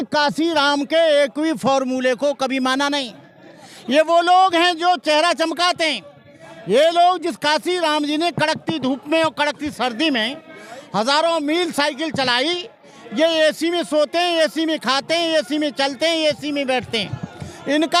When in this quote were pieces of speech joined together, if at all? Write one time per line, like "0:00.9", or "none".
none